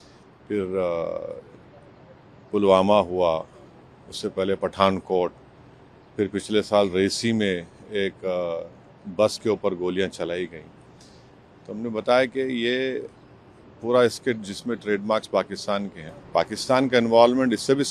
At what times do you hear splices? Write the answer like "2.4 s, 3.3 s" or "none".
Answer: 16.0 s